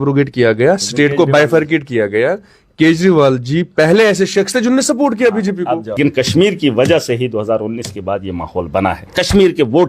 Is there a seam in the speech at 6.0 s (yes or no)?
yes